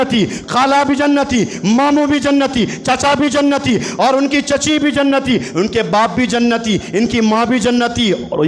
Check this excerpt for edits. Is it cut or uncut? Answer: uncut